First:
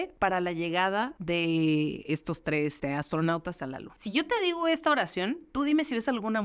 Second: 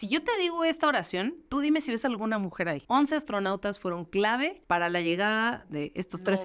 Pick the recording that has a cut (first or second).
first